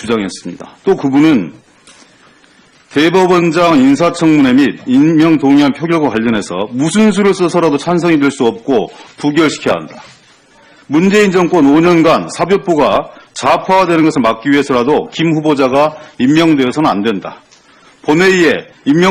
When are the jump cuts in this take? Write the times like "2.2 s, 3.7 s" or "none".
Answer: none